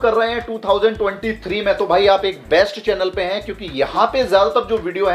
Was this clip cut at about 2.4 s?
no; 0 cuts

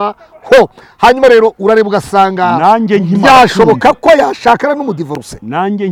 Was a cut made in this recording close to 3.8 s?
no; 0 cuts

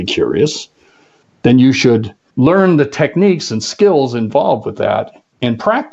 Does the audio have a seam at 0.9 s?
no; 1 cut; at 2.2 s

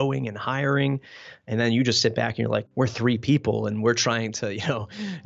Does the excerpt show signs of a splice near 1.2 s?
no; 1 cut; at 2.7 s

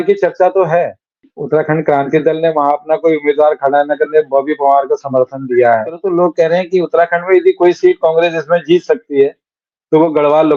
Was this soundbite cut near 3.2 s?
no; 2 cuts; at 1.3 s, 6.0 s

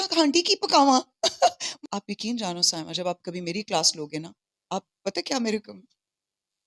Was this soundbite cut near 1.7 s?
yes; 1 cut; at 1.7 s

